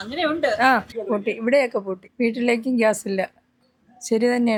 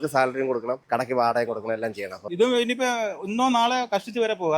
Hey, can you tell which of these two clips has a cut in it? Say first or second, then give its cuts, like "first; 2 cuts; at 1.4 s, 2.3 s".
second; 1 cut; at 2.2 s